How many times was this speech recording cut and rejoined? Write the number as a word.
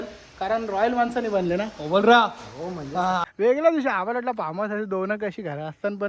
one